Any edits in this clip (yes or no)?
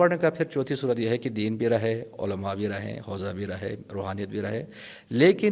no